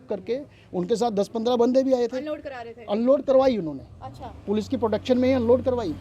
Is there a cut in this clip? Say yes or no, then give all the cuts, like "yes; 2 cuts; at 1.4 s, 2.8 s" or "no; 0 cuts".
no; 0 cuts